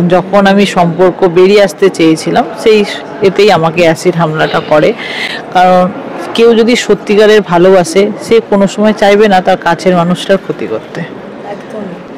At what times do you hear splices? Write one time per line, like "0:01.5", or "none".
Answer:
none